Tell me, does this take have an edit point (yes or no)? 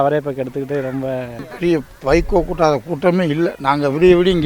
yes